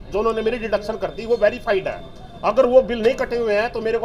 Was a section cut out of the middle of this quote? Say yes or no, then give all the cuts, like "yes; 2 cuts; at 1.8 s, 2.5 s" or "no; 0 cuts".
no; 0 cuts